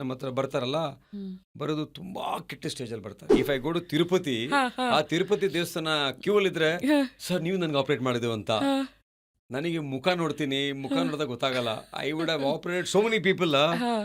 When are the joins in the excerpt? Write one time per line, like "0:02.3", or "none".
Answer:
0:03.2